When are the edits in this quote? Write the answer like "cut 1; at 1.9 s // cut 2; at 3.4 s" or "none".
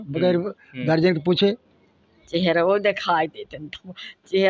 cut 1; at 2.1 s